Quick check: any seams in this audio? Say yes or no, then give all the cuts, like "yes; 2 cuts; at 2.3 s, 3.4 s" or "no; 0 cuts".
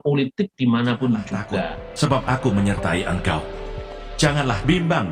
yes; 1 cut; at 1.8 s